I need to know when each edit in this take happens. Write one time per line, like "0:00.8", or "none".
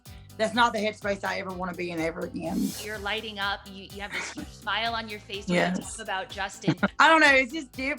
0:02.8
0:06.9

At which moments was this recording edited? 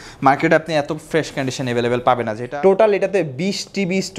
0:02.4

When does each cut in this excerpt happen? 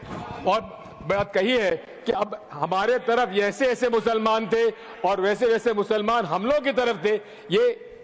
none

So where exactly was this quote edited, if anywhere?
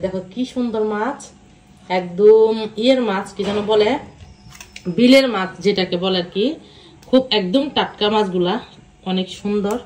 none

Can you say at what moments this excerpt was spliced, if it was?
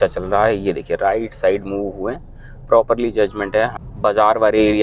0:03.7

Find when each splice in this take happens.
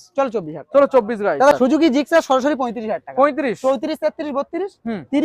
0:01.6

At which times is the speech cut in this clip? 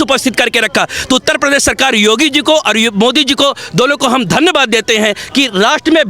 none

